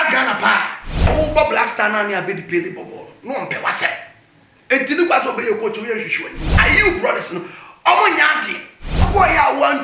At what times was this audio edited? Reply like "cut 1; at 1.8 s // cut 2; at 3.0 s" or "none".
cut 1; at 1.1 s // cut 2; at 6.6 s // cut 3; at 9.1 s